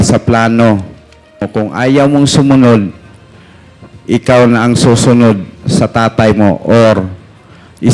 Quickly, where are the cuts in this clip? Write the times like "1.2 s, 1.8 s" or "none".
1.5 s